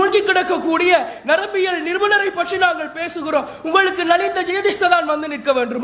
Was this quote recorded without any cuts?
yes; 0 cuts

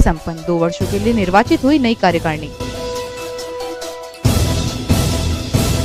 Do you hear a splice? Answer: no; 0 cuts

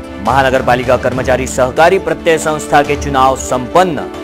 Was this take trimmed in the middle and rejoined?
no; 0 cuts

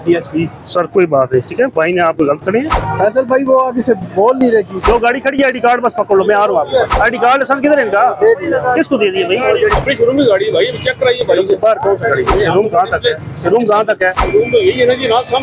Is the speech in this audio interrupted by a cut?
yes; 6 cuts; at 2.8 s, 4.8 s, 6.9 s, 9.7 s, 12.3 s, 14.2 s

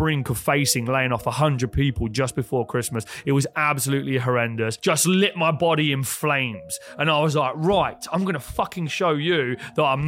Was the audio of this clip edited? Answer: yes; 1 cut; at 4.8 s

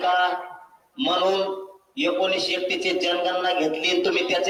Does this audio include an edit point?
no; 0 cuts

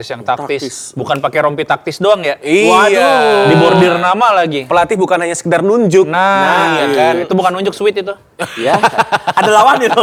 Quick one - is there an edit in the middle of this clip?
no; 0 cuts

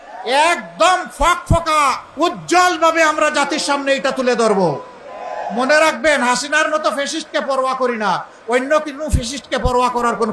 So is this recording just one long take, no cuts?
no; 1 cut; at 2.0 s

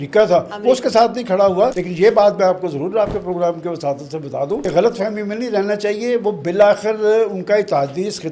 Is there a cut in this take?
yes; 2 cuts; at 1.8 s, 4.6 s

